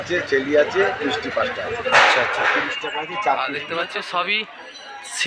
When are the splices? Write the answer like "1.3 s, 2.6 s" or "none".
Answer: 3.9 s